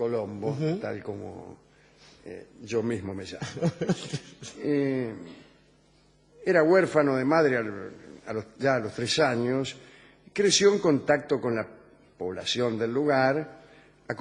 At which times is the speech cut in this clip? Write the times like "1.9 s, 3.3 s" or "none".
none